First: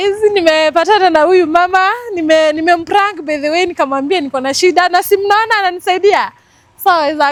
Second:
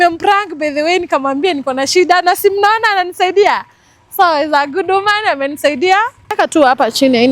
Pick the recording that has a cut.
second; 1 cut; at 6.3 s

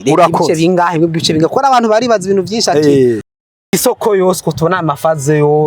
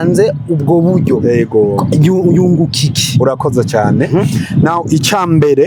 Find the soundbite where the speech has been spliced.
first; 1 cut; at 3.7 s

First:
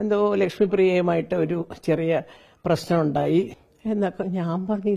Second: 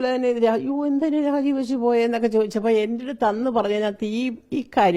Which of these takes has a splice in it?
first; 1 cut; at 3.6 s

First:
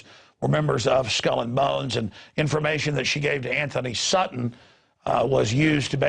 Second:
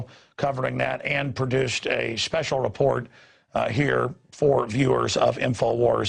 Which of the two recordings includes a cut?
first; 1 cut; at 3.6 s

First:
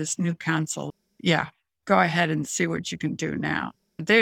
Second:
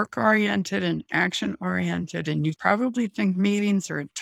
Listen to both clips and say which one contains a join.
second; 1 cut; at 2.6 s

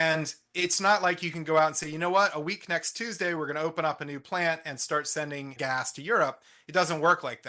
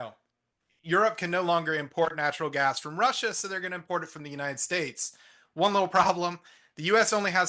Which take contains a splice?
first; 1 cut; at 5.5 s

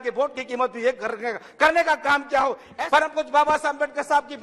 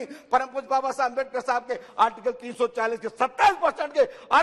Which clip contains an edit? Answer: first; 1 cut; at 2.6 s

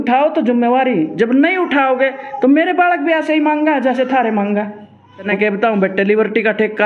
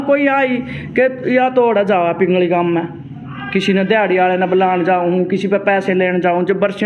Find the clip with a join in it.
first; 1 cut; at 5.3 s

